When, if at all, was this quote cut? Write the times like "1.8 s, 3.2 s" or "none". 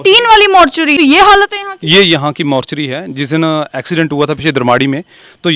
1.0 s